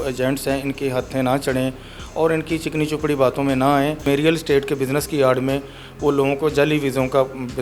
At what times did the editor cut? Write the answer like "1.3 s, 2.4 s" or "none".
4.0 s

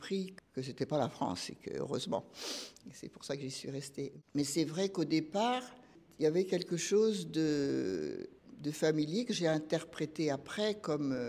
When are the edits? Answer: none

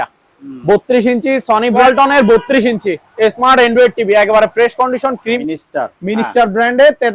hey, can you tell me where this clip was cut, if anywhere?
1.8 s, 5.4 s

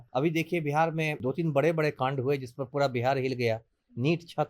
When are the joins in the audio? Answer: 1.2 s

